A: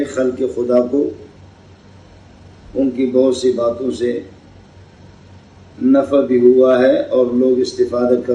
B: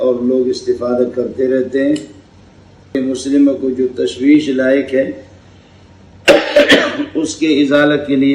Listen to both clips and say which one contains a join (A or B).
B